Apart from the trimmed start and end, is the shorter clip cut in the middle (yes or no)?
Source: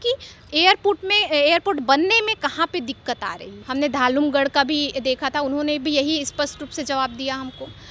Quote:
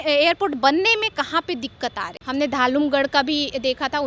yes